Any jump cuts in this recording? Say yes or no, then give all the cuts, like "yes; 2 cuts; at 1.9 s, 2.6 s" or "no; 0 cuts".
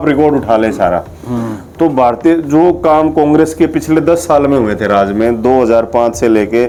no; 0 cuts